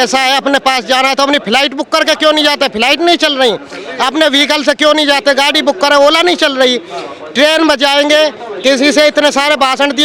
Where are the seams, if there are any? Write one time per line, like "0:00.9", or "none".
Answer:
none